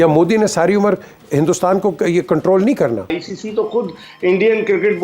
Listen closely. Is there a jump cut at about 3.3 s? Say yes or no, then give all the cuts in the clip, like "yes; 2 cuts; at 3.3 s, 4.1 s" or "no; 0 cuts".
yes; 1 cut; at 3.3 s